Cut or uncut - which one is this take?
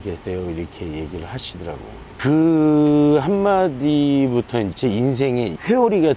cut